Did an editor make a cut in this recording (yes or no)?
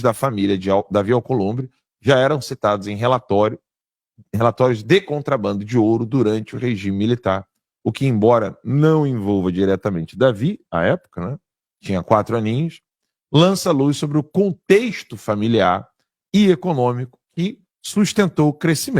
no